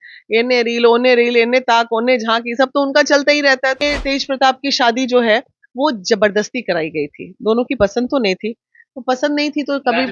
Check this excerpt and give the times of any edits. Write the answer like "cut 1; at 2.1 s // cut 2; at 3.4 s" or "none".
cut 1; at 3.8 s